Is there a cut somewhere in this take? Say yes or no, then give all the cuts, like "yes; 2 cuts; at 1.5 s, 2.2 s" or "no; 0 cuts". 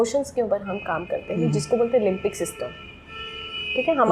no; 0 cuts